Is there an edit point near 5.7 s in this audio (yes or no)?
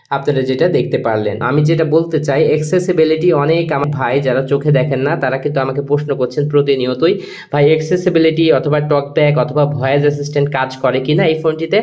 no